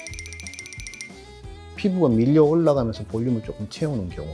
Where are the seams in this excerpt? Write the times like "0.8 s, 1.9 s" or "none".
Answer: none